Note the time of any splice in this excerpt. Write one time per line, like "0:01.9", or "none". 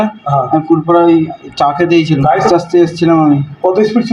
0:02.4